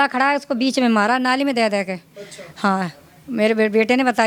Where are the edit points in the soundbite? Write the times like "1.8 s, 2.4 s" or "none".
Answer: none